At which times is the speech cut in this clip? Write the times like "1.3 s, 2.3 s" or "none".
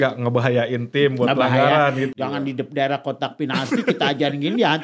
2.1 s